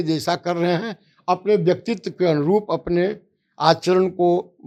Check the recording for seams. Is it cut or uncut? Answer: uncut